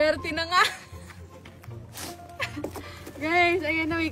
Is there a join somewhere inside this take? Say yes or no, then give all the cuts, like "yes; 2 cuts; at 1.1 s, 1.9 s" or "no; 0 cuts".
no; 0 cuts